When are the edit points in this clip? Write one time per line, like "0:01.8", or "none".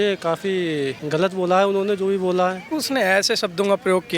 0:01.0
0:02.7